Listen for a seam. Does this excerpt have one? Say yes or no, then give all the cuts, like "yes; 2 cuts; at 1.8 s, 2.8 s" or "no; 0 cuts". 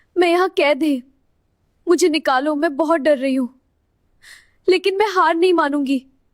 no; 0 cuts